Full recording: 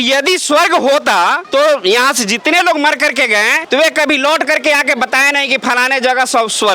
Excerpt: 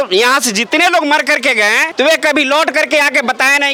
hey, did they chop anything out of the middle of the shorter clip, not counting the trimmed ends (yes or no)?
no